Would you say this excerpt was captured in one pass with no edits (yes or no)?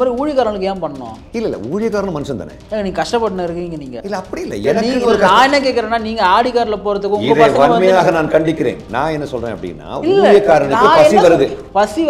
yes